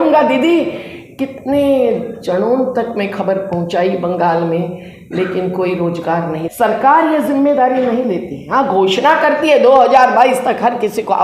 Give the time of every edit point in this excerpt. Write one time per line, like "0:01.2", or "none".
0:06.4